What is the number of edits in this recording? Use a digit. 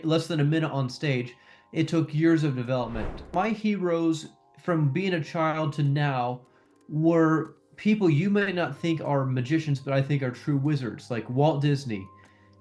1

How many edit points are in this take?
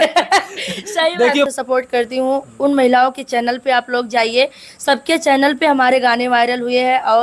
1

